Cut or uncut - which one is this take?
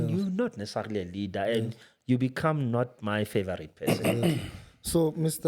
uncut